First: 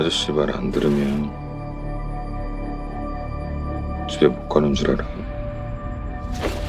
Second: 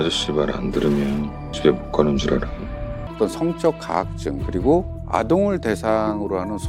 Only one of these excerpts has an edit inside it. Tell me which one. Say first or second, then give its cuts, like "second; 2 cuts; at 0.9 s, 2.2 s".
second; 2 cuts; at 1.5 s, 3.0 s